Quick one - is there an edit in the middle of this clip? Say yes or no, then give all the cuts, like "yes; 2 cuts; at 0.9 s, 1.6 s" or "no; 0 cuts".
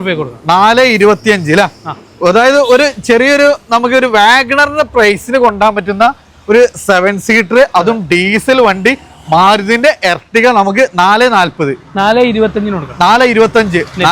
no; 0 cuts